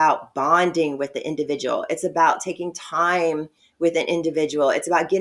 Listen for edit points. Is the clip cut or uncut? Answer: uncut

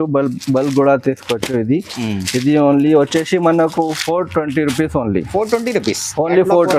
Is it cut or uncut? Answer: uncut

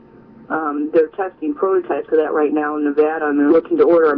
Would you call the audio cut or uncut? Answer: cut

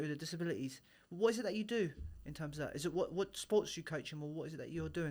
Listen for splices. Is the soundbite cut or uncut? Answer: uncut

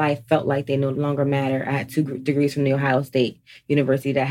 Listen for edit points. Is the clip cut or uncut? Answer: cut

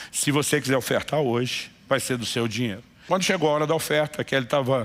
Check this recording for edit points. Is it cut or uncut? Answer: cut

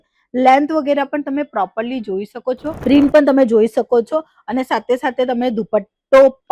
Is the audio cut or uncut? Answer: cut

